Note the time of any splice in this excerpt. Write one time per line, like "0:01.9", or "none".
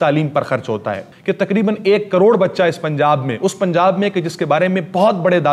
none